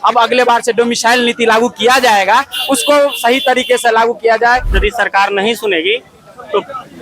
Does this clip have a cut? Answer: yes; 1 cut; at 4.7 s

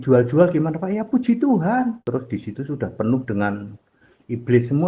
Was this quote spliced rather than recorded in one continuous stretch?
yes; 1 cut; at 2.0 s

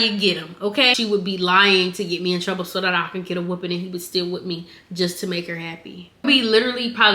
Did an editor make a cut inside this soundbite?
yes; 2 cuts; at 0.9 s, 6.2 s

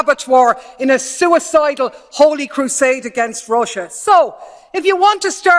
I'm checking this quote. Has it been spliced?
yes; 1 cut; at 3.9 s

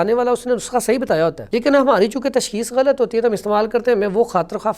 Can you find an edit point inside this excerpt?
yes; 1 cut; at 1.4 s

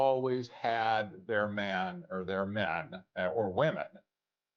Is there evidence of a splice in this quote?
no; 0 cuts

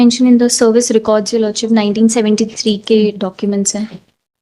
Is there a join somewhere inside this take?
no; 0 cuts

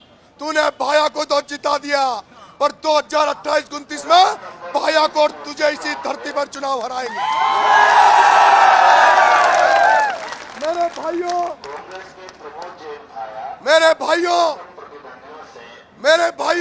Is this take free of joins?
yes; 0 cuts

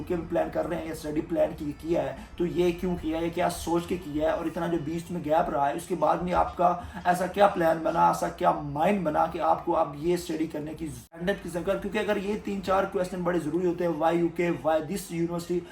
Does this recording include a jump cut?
yes; 1 cut; at 11.2 s

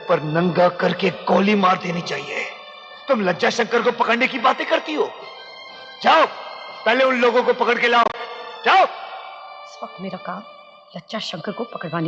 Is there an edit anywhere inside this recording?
no; 0 cuts

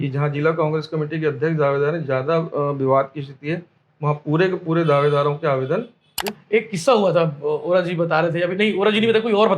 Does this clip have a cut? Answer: yes; 1 cut; at 6.3 s

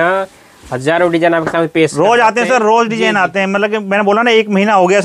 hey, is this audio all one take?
yes; 0 cuts

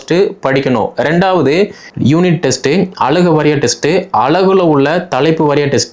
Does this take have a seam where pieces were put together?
yes; 1 cut; at 1.8 s

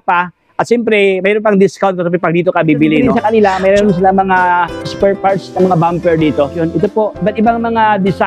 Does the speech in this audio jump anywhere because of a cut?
yes; 1 cut; at 3.1 s

